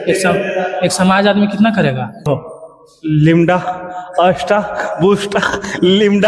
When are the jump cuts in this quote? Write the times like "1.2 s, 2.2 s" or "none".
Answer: 2.3 s